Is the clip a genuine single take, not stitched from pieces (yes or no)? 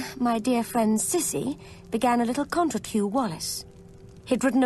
yes